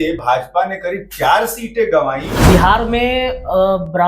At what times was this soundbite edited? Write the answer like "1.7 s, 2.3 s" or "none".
2.3 s